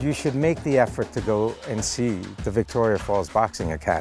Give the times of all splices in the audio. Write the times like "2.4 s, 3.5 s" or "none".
2.3 s